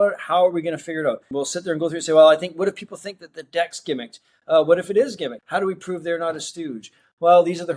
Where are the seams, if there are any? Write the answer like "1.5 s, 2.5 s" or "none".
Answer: 1.3 s, 5.4 s